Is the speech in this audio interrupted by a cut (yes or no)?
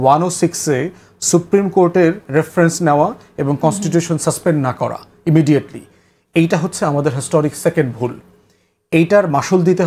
no